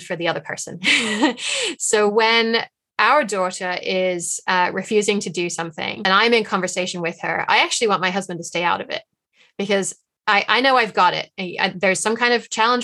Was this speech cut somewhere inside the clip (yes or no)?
yes